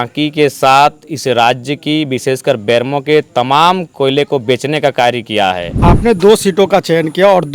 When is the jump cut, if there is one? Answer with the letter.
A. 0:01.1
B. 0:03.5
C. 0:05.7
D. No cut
C